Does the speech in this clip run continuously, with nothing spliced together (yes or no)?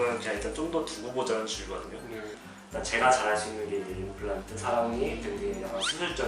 no